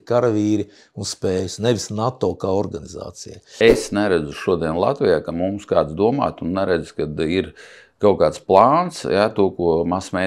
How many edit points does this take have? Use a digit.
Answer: 1